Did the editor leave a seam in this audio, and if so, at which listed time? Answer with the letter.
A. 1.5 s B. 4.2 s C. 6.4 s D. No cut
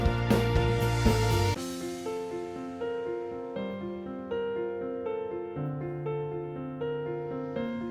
A